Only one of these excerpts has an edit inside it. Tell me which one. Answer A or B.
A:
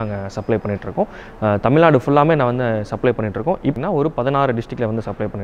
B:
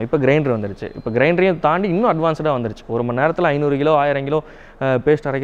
A